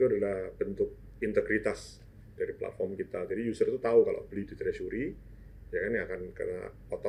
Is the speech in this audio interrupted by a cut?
no; 0 cuts

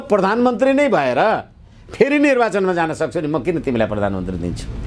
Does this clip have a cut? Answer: no; 0 cuts

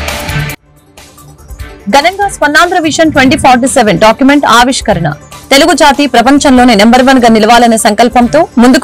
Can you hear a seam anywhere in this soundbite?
yes; 1 cut; at 1.8 s

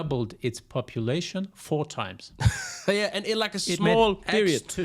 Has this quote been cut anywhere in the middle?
no; 0 cuts

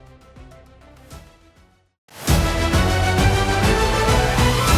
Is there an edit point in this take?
yes; 1 cut; at 2.1 s

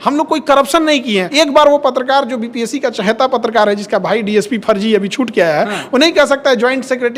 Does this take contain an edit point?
yes; 1 cut; at 1.3 s

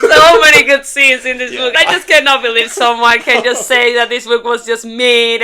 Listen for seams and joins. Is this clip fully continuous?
no; 1 cut; at 1.7 s

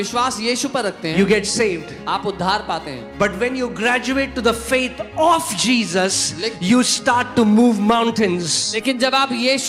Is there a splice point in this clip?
no; 0 cuts

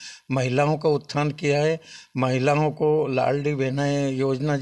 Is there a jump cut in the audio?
no; 0 cuts

